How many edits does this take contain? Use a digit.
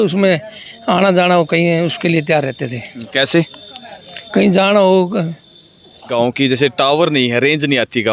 1